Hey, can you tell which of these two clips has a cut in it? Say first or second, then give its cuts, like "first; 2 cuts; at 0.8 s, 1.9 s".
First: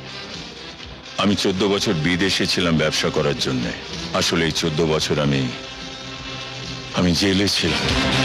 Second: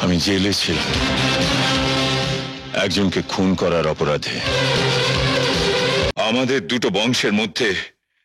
second; 1 cut; at 6.1 s